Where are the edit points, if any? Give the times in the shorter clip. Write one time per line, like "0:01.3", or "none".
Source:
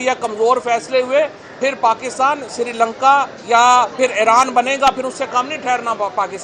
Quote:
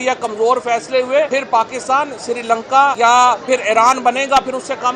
0:01.3
0:02.9